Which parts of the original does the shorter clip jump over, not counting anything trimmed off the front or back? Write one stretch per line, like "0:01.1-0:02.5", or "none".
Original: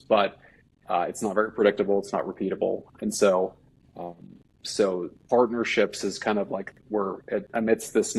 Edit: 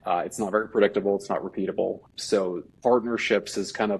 0:02.9-0:04.5